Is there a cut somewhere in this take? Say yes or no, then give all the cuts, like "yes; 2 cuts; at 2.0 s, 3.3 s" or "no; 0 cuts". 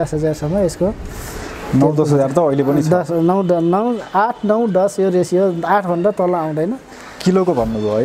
no; 0 cuts